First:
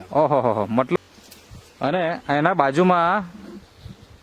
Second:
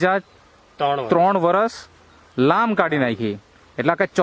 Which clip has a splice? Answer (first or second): first